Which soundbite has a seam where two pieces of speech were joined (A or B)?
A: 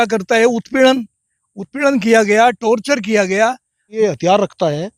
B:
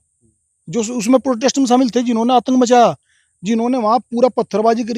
A